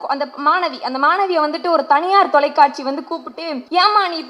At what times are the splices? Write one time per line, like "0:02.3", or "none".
0:03.3